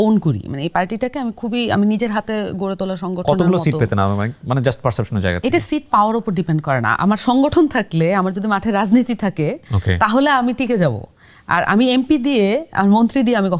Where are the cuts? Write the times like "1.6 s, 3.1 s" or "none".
none